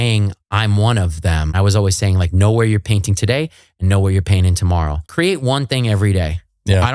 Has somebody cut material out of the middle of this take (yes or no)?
yes